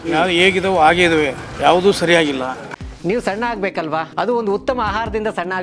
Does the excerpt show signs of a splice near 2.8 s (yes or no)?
yes